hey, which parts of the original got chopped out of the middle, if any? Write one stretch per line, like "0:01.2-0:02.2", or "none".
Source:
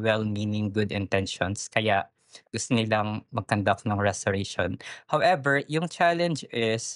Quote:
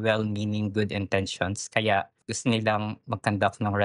0:02.2-0:02.5

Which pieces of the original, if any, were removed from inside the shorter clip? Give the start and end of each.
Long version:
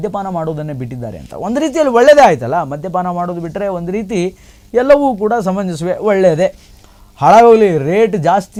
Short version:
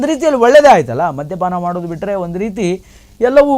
none

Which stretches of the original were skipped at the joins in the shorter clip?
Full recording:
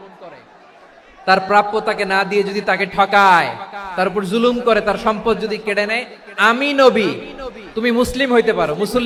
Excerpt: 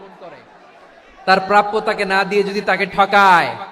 none

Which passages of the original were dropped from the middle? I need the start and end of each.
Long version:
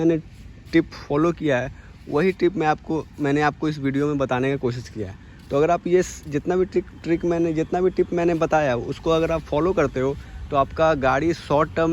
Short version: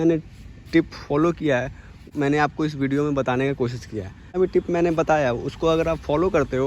0:02.0-0:03.1
0:05.4-0:07.8

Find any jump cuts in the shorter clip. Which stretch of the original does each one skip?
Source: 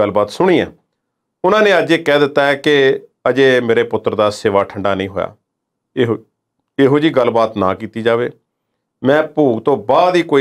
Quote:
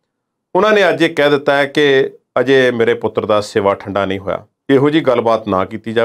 0:05.4-0:06.6

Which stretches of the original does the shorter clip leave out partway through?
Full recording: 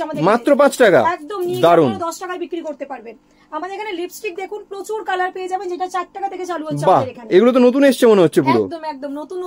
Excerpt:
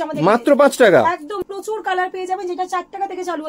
0:01.3-0:04.5

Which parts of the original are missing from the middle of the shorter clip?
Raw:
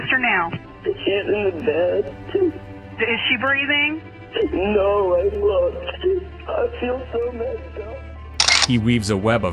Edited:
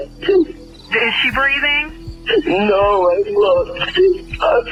none

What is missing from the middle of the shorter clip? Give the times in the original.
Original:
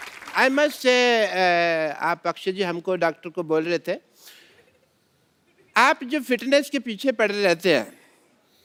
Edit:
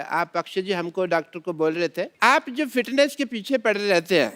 0:04.0-0:05.7

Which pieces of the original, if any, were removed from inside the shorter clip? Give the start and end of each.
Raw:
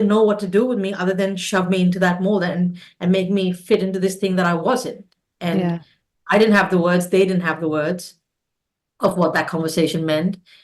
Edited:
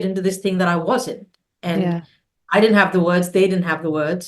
none

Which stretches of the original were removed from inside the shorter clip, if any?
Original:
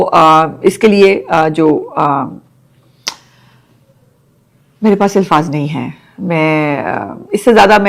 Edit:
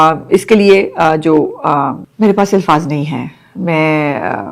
0:02.4-0:04.7

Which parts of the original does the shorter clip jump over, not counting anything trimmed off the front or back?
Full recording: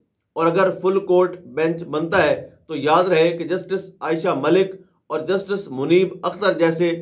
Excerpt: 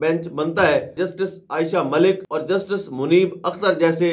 0:02.5-0:03.5
0:04.8-0:05.1

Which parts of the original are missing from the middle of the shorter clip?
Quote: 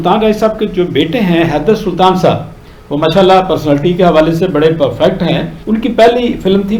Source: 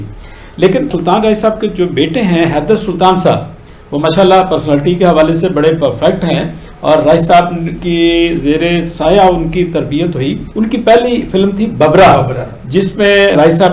0:06.6-0:10.5

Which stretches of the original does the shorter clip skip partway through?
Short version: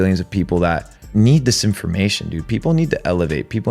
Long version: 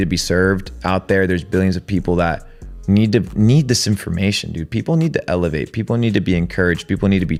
0:02.6-0:03.3

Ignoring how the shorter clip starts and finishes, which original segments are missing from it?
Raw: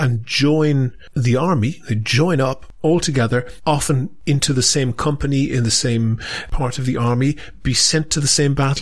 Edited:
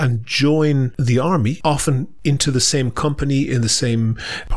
0:01.3-0:03.3

